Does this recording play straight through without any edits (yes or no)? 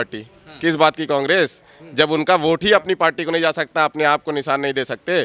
yes